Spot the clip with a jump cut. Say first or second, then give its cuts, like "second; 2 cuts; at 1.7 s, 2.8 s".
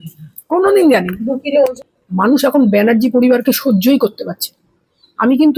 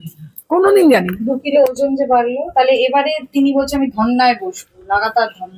first; 1 cut; at 1.8 s